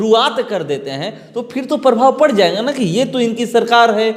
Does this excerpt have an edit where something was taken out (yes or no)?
no